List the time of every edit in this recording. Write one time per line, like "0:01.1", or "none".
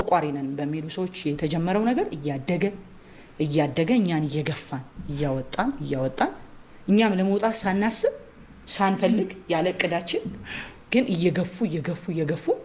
none